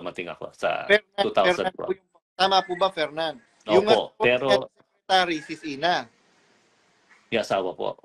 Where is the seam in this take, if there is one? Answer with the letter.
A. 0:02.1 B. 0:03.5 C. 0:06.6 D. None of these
B